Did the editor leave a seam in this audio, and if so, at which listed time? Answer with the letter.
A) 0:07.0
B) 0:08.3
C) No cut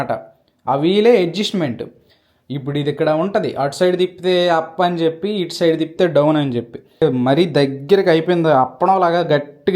A